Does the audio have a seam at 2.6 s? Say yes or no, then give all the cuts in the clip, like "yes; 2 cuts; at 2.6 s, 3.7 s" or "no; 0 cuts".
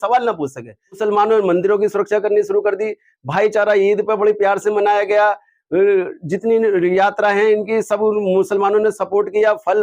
no; 1 cut; at 1.0 s